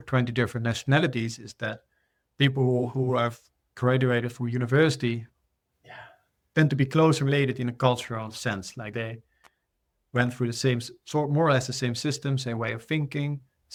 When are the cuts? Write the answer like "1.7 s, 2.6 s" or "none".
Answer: none